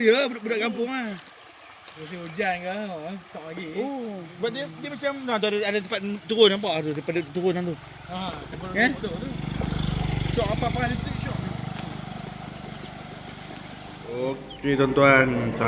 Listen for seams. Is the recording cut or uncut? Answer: cut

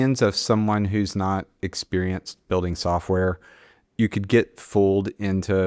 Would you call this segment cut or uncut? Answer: cut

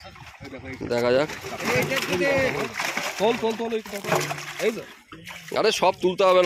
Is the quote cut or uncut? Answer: uncut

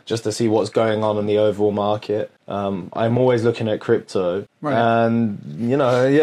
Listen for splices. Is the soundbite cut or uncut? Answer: cut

